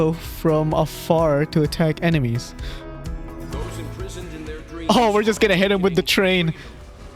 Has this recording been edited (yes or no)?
no